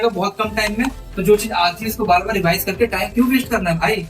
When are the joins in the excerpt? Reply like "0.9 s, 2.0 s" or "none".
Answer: 1.0 s